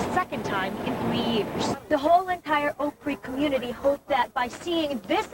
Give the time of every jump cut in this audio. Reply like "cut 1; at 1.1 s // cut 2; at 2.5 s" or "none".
cut 1; at 1.8 s

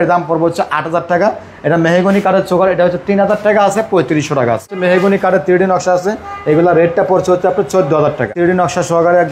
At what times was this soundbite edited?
cut 1; at 4.7 s // cut 2; at 8.3 s

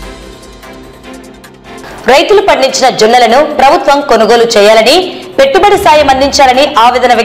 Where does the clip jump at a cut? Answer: none

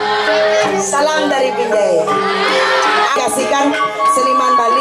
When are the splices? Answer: cut 1; at 3.2 s

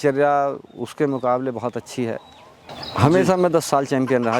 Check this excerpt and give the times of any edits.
cut 1; at 2.8 s

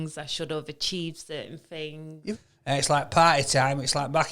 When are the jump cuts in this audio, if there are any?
cut 1; at 2.3 s

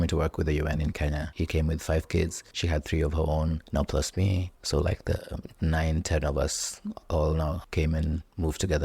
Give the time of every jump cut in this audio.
cut 1; at 1.3 s // cut 2; at 2.5 s // cut 3; at 3.6 s // cut 4; at 4.5 s // cut 5; at 7.6 s

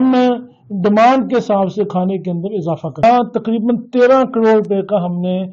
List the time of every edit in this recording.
cut 1; at 3.0 s

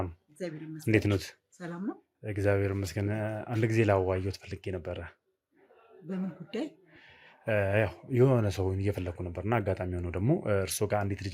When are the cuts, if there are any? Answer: none

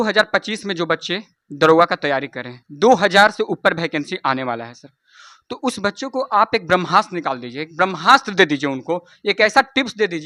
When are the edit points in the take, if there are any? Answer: none

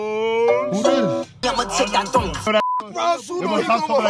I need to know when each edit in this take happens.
cut 1; at 1.4 s

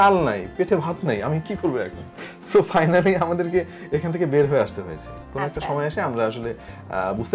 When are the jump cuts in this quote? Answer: none

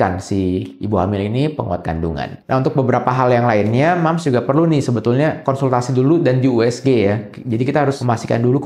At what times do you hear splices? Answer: cut 1; at 2.4 s

